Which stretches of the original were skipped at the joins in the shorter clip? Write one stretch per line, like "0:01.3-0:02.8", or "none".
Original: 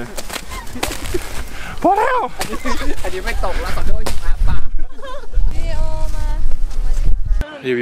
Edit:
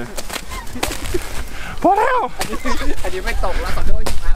none